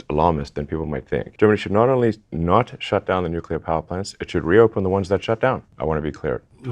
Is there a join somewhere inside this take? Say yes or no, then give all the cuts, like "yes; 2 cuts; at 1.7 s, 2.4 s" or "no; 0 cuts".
yes; 2 cuts; at 1.3 s, 5.7 s